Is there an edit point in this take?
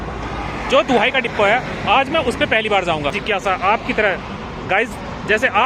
yes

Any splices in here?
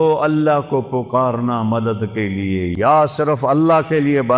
yes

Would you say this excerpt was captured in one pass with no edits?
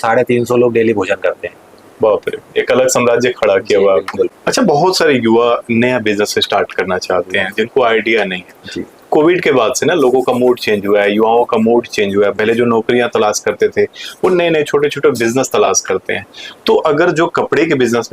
yes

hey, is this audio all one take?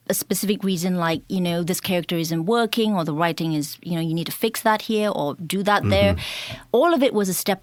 yes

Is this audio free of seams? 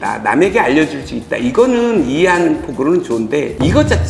yes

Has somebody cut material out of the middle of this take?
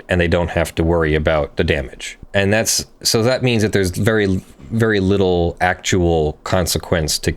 yes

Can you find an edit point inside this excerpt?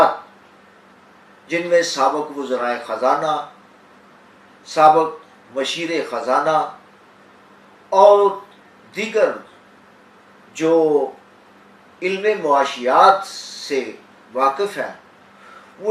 no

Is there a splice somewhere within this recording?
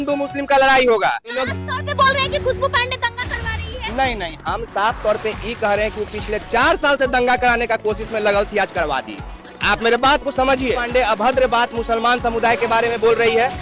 yes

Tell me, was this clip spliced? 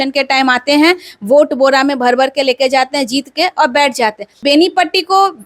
yes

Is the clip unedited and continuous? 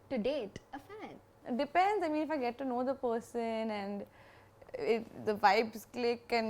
no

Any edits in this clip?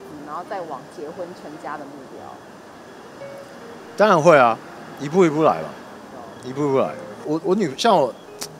yes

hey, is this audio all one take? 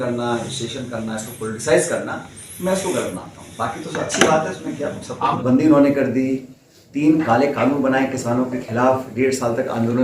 no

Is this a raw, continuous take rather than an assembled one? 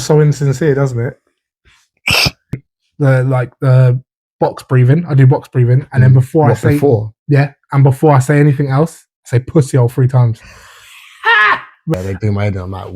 no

